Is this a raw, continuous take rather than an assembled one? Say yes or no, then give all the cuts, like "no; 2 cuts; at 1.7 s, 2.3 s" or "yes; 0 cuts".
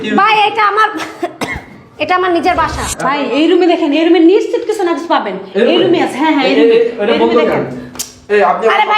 no; 1 cut; at 2.8 s